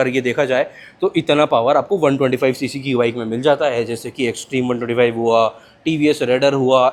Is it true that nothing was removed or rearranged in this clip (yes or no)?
yes